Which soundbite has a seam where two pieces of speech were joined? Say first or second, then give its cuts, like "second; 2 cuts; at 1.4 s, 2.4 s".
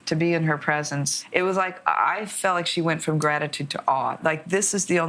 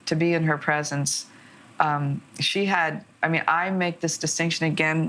first; 2 cuts; at 1.2 s, 4.2 s